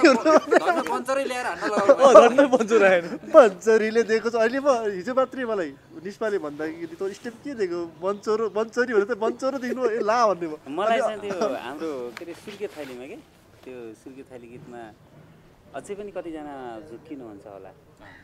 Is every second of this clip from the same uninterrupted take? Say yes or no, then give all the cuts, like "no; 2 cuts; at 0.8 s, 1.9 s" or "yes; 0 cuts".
yes; 0 cuts